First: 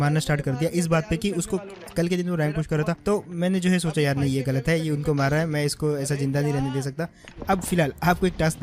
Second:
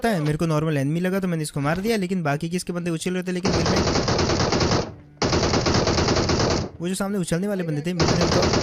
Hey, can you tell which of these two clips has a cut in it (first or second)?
first